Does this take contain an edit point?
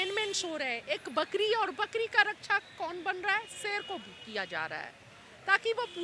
no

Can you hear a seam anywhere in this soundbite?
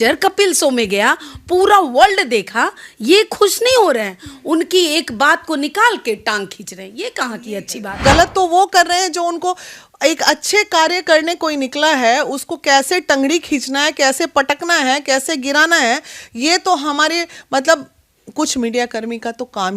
yes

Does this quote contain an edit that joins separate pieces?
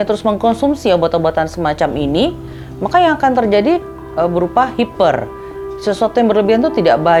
no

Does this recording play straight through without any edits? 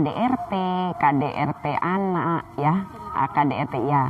yes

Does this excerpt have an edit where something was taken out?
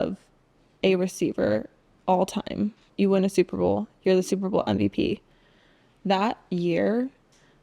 yes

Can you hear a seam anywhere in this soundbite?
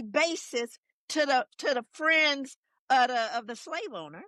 no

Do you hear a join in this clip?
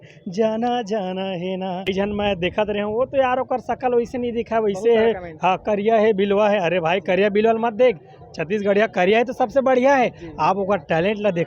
yes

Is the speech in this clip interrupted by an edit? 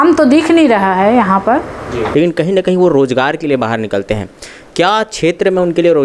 yes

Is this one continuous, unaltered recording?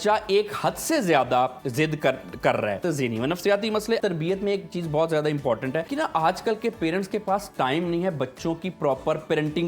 no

